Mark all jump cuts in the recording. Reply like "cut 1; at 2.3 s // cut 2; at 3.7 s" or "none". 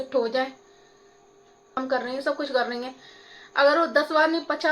cut 1; at 1.8 s